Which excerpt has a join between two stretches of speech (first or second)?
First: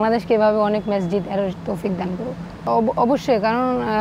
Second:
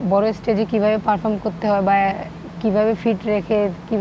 first